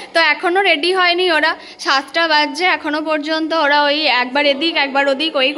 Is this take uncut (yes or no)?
yes